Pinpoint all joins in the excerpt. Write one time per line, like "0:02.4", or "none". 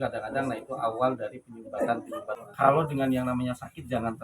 0:02.4